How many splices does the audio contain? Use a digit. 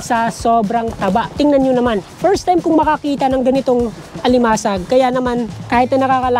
3